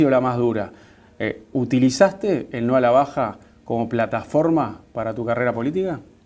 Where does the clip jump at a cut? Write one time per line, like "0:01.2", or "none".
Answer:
0:03.8